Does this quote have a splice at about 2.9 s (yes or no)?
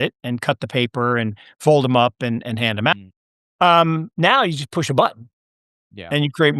yes